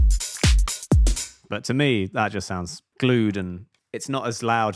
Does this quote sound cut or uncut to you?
cut